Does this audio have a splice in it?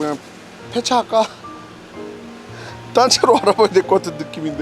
no; 0 cuts

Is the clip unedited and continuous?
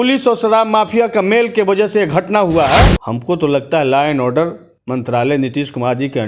no; 1 cut; at 3.0 s

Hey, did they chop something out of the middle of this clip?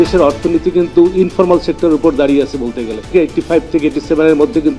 yes; 1 cut; at 3.1 s

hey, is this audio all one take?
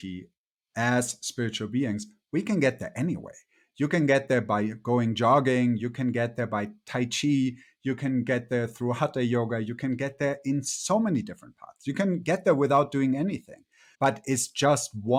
yes; 0 cuts

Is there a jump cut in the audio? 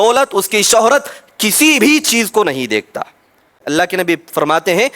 yes; 1 cut; at 3.6 s

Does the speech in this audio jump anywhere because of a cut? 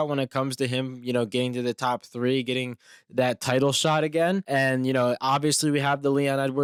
no; 0 cuts

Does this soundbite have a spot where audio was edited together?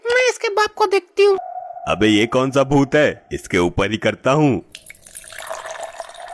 yes; 1 cut; at 1.5 s

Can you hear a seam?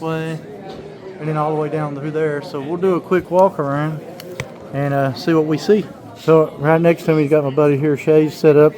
no; 0 cuts

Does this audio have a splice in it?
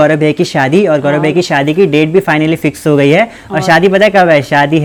no; 0 cuts

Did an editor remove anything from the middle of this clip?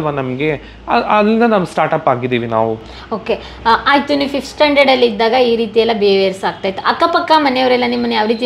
no; 0 cuts

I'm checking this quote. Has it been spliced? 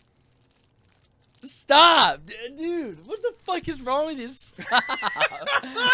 no; 0 cuts

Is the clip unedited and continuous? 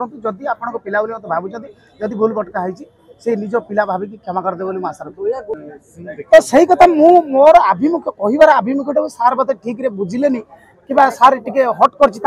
yes; 0 cuts

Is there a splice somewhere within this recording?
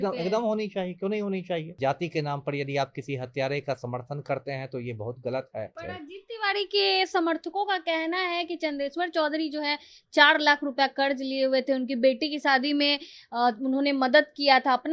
yes; 2 cuts; at 1.7 s, 5.8 s

